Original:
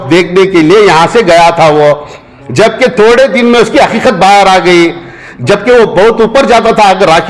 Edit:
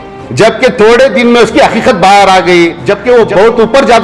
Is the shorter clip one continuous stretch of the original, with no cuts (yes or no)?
no